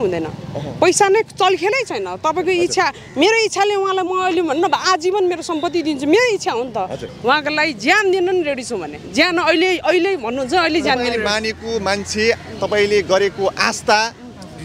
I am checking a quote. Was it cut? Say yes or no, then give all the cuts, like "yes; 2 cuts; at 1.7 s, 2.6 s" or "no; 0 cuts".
yes; 1 cut; at 7.1 s